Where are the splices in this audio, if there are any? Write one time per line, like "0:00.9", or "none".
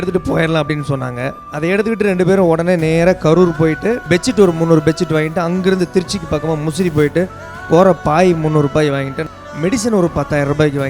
0:01.4
0:04.0
0:09.2